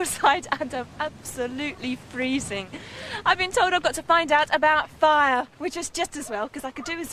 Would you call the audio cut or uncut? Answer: uncut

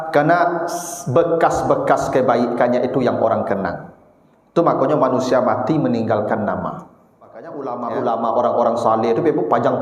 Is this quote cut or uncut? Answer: cut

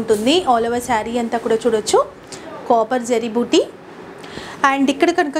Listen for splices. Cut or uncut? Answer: uncut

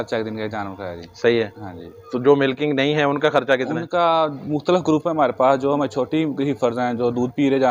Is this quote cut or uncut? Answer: uncut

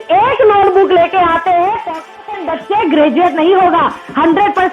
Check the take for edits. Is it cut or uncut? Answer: cut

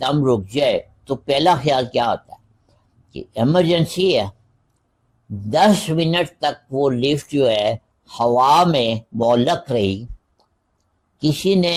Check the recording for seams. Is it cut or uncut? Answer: uncut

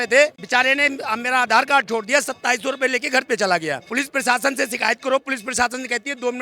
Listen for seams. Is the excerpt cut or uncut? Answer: uncut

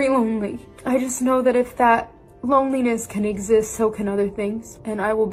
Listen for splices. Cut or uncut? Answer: uncut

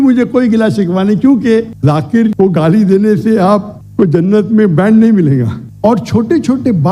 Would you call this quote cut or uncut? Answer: cut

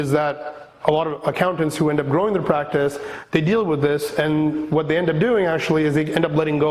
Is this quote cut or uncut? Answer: uncut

